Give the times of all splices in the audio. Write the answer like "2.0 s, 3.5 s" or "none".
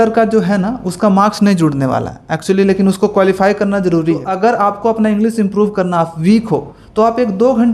4.3 s